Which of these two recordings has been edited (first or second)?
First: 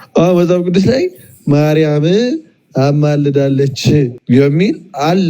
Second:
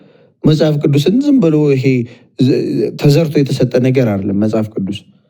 first